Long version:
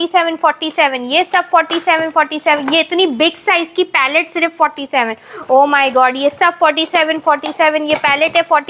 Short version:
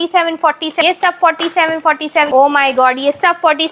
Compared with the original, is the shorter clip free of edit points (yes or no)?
no